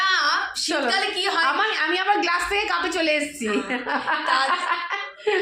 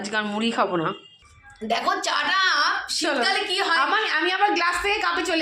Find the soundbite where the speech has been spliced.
second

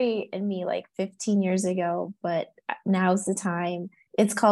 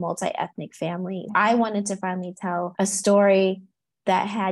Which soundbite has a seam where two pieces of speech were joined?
second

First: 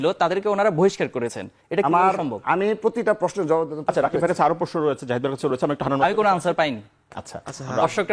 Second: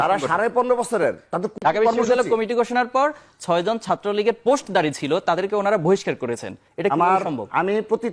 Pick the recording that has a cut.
second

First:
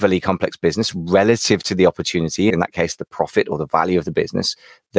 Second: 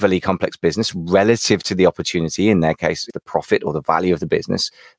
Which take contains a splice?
first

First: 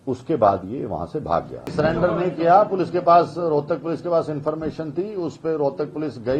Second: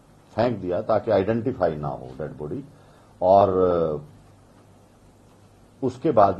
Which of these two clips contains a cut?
first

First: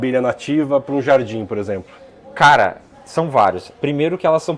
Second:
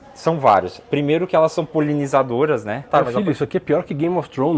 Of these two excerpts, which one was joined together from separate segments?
second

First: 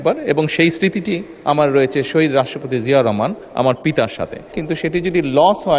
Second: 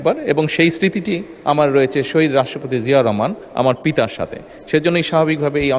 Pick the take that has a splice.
first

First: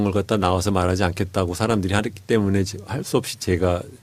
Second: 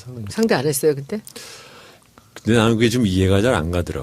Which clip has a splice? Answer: second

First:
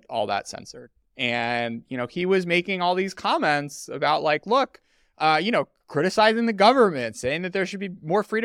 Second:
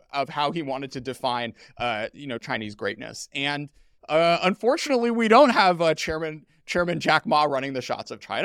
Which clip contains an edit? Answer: second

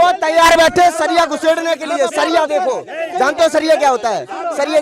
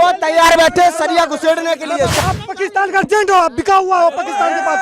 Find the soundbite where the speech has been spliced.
second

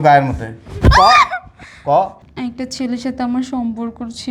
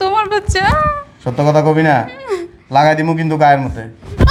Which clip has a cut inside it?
first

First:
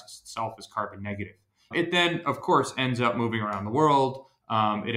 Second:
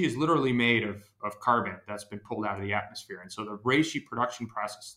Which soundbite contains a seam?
first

